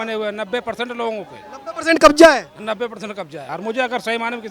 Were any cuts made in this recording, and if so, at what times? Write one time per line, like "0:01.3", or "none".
0:03.5

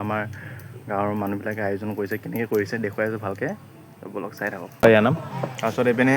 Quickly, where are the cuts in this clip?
0:04.8

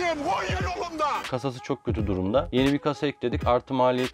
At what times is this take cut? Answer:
0:01.2
0:02.5

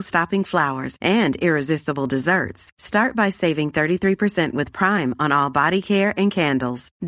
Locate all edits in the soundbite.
none

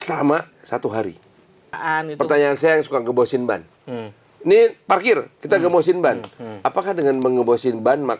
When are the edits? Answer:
0:01.8

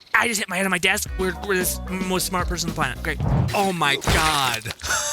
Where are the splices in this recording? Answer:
0:03.3

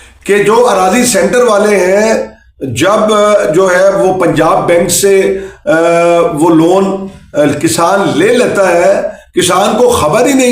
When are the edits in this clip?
none

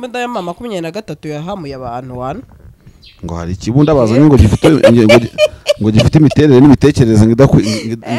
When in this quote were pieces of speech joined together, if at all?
none

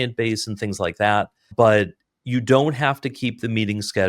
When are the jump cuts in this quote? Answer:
0:01.5

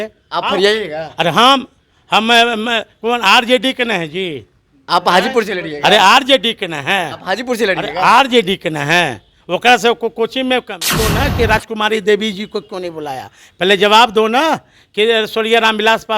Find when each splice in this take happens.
0:11.1

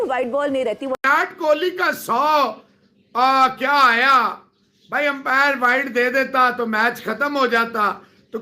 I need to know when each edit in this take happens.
0:00.9

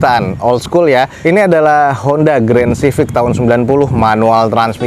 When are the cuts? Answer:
none

